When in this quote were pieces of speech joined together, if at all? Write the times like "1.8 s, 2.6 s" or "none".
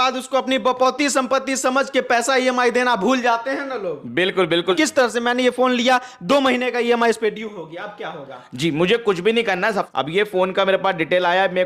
4.8 s, 9.9 s